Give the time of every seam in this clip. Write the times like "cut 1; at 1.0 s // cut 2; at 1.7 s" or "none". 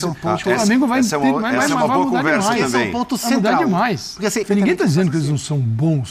cut 1; at 4.4 s